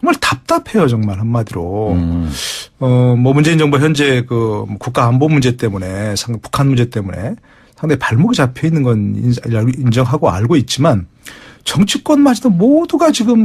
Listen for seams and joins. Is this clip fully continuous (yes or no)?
yes